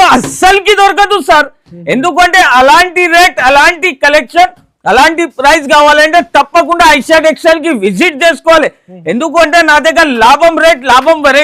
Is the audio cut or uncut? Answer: uncut